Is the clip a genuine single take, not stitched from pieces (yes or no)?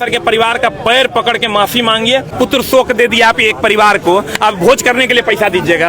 no